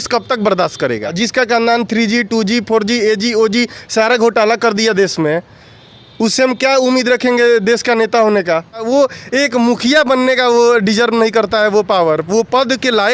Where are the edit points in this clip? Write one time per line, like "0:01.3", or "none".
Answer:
0:01.1
0:08.8